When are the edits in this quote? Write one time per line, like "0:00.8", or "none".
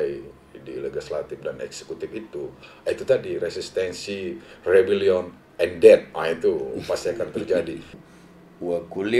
0:08.0